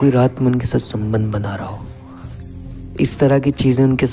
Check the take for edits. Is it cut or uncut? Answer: uncut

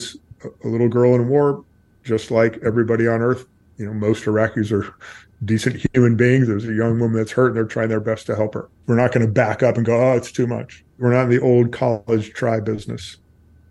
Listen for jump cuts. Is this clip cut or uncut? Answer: cut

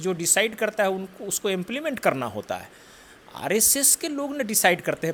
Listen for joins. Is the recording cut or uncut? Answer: uncut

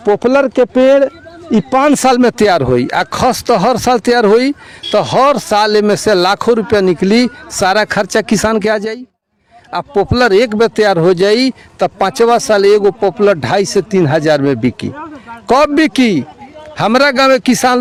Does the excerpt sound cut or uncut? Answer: uncut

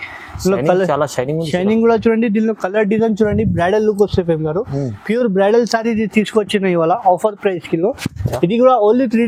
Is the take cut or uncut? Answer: uncut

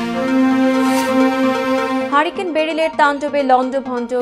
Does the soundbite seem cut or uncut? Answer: cut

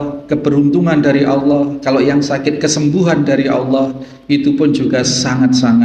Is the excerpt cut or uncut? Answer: uncut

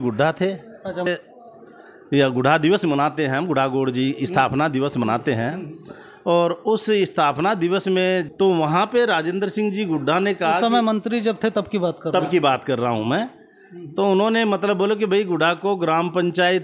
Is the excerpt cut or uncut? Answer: cut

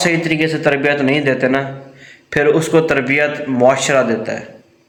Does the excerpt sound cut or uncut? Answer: uncut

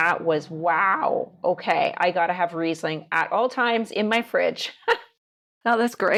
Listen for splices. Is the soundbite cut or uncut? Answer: uncut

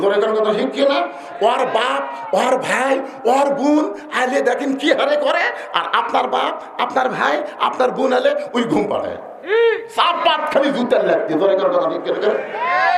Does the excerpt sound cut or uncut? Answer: uncut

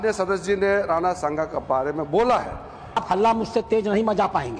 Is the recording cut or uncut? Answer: cut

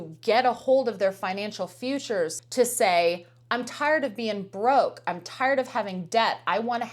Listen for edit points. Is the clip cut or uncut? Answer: cut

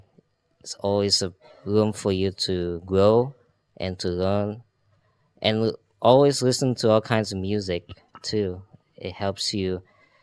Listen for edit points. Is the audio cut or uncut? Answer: uncut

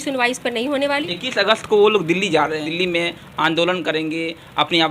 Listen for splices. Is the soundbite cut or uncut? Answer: cut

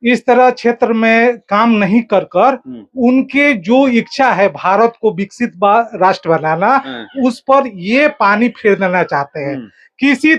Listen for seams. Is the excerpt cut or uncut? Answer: uncut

